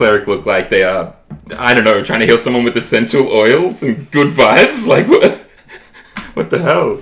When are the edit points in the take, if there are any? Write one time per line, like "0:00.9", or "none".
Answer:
none